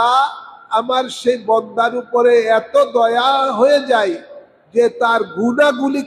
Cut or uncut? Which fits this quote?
uncut